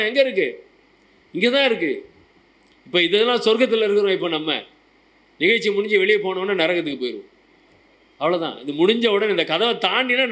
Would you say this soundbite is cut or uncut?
uncut